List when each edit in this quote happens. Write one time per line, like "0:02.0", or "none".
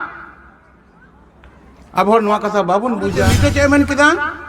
0:03.3